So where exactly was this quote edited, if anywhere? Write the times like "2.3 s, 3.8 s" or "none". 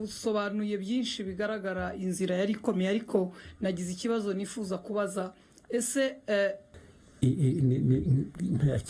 6.7 s